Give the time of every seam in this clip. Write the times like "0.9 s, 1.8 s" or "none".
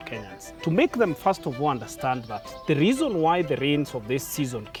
none